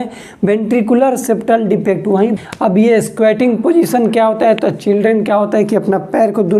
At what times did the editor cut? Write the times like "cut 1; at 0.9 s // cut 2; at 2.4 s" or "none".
cut 1; at 2.4 s